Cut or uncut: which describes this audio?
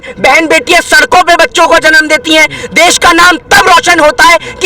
uncut